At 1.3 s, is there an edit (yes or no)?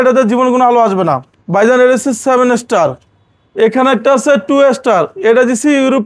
yes